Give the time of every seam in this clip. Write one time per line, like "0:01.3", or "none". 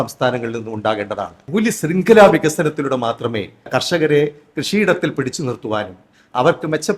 0:01.4
0:03.7